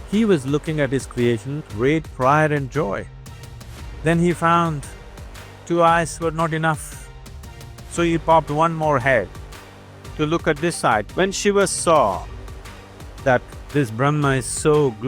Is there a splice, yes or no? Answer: yes